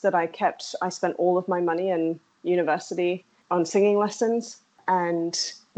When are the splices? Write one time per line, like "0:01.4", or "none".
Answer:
0:03.3
0:04.8